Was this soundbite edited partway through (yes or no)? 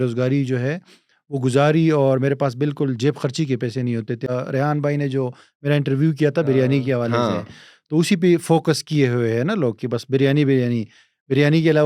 yes